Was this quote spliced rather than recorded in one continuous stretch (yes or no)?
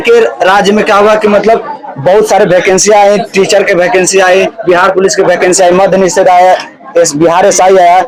no